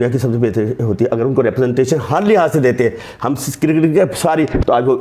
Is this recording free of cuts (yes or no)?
yes